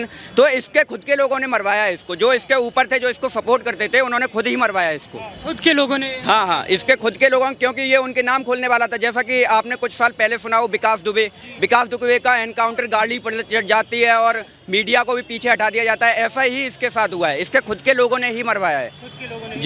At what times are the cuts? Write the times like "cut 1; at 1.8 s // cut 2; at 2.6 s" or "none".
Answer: none